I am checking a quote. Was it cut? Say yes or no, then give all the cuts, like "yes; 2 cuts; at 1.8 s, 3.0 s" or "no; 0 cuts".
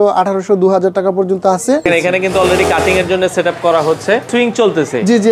yes; 2 cuts; at 1.9 s, 4.3 s